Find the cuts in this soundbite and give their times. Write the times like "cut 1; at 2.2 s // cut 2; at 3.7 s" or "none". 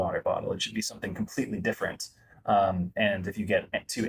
none